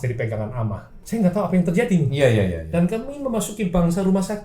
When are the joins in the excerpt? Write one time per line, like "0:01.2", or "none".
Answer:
0:00.9